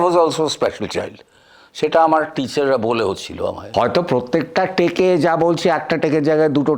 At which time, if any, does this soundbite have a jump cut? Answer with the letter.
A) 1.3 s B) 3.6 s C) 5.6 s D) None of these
B